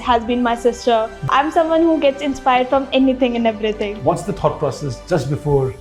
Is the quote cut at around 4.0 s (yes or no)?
yes